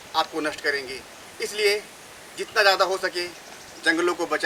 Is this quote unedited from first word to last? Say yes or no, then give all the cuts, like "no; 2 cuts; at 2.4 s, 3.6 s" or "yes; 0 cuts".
yes; 0 cuts